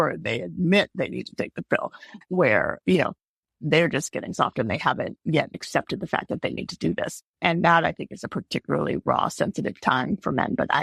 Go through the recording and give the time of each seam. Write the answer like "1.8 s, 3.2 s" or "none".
2.1 s